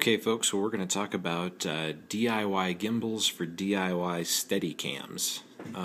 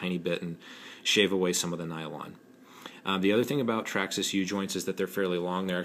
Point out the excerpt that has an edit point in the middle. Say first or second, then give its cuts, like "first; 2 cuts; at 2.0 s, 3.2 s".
second; 1 cut; at 1.7 s